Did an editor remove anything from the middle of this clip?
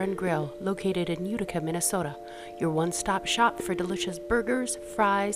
no; 0 cuts

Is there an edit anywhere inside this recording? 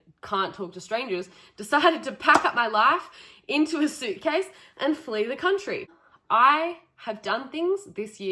yes; 1 cut; at 6.0 s

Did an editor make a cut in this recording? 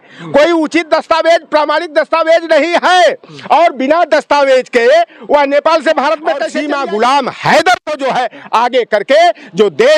yes; 1 cut; at 6.5 s

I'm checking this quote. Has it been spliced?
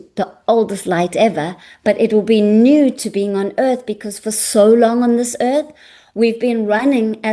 no; 0 cuts

